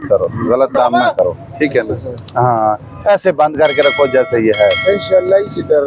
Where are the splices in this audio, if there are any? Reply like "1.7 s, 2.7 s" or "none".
none